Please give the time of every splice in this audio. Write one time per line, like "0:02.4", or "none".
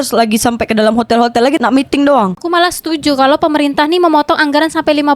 0:02.4

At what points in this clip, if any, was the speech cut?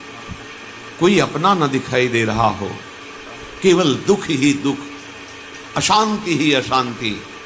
0:00.9

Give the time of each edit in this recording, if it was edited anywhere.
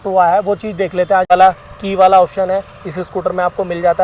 0:01.3

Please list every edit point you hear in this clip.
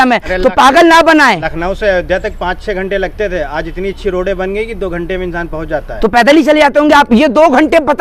none

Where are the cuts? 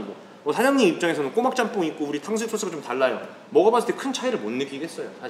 none

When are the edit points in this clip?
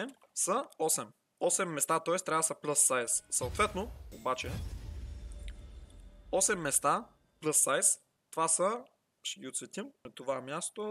none

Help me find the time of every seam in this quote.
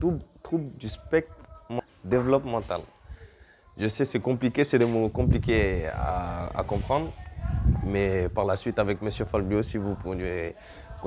0:01.8

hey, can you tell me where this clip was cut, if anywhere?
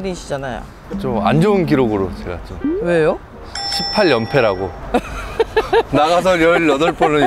0:04.7

